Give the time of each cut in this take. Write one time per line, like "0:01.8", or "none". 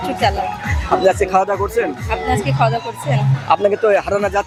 none